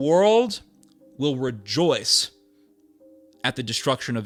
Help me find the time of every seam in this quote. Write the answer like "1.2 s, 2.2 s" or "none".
none